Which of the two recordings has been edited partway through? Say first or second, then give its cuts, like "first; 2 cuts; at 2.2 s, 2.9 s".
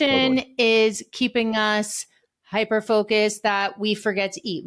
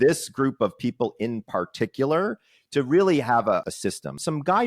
second; 1 cut; at 3.7 s